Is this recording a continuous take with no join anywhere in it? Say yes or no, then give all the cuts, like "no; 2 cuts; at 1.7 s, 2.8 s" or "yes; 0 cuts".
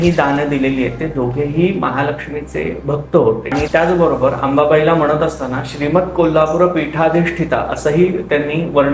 no; 1 cut; at 3.5 s